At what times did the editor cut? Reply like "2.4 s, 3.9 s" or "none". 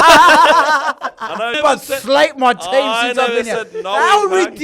1.6 s